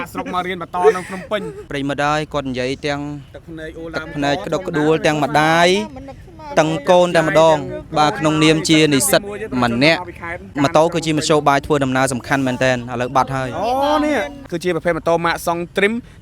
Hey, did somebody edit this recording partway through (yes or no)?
yes